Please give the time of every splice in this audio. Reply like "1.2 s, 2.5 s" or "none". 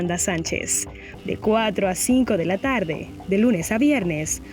1.1 s